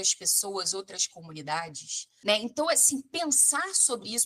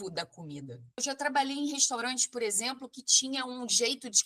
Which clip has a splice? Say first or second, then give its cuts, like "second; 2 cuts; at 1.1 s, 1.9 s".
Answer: second; 1 cut; at 1.0 s